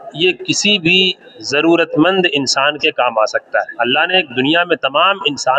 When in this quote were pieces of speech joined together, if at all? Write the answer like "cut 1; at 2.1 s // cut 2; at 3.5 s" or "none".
cut 1; at 3.7 s